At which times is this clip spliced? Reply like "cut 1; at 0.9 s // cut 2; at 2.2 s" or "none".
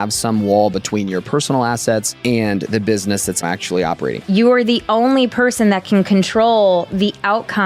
cut 1; at 2.1 s // cut 2; at 3.8 s